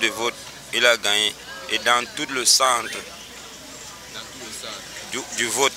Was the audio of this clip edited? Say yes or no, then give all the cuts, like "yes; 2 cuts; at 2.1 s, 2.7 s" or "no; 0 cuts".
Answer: no; 0 cuts